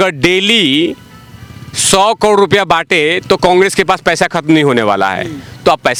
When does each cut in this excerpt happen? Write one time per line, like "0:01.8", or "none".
none